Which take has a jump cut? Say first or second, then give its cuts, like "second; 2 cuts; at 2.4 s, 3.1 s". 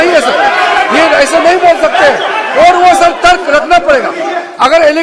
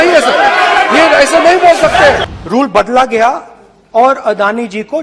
second; 1 cut; at 2.3 s